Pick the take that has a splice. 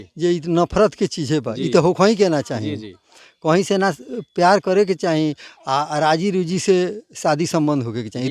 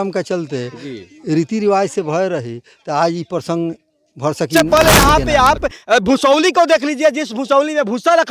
second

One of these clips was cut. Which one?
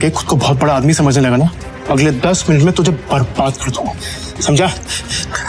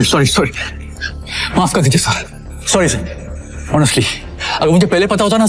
first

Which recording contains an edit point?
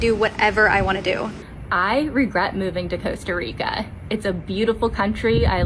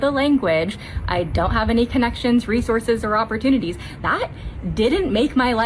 first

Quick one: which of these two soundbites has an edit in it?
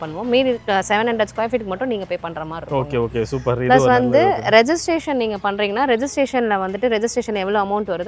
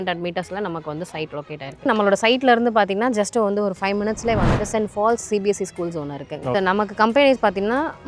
second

